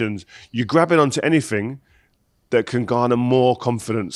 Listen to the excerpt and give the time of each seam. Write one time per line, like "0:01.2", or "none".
none